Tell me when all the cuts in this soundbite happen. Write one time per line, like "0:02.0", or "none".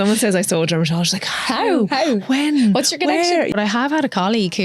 0:03.5